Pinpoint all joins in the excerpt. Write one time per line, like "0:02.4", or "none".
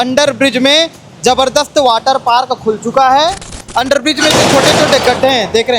0:03.6